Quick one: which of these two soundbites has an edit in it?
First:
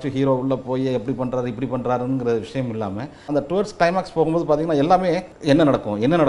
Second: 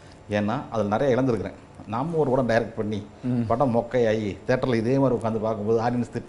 first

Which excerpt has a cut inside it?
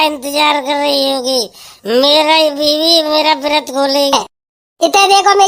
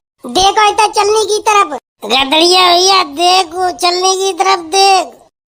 first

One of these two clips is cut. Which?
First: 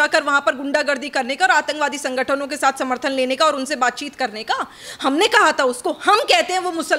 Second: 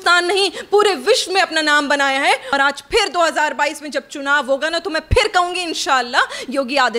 second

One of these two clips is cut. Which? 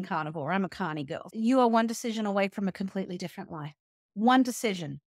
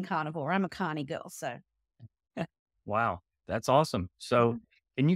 first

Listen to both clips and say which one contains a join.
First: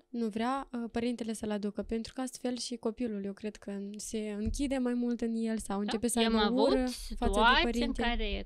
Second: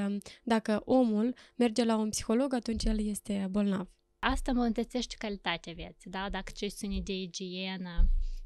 second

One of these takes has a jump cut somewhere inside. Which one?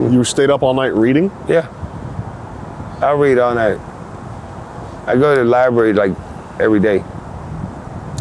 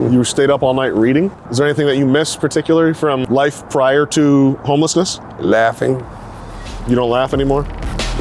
second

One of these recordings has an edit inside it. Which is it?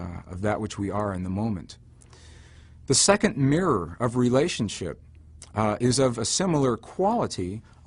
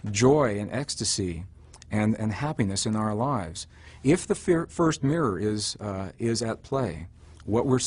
second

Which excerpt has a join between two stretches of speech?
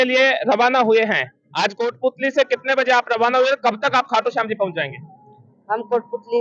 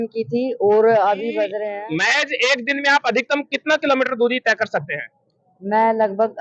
second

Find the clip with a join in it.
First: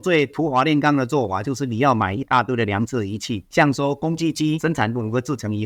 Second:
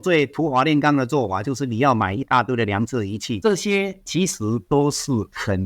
second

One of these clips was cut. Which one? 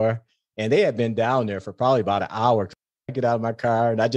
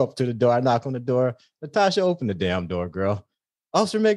first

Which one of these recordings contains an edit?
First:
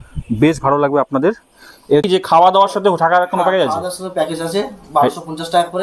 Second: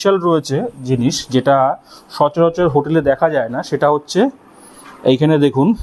first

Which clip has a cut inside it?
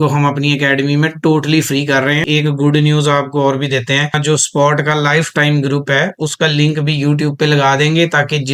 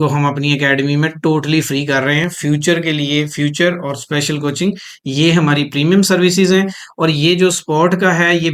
first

